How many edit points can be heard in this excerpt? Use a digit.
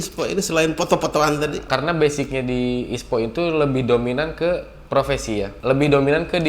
2